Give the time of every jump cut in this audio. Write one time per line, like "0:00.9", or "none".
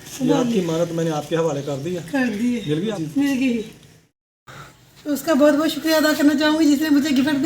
0:02.8
0:04.1